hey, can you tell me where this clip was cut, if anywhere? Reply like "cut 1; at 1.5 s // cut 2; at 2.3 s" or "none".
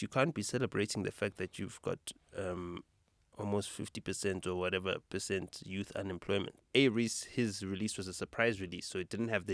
cut 1; at 6.6 s